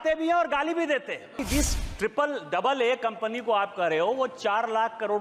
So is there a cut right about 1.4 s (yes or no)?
yes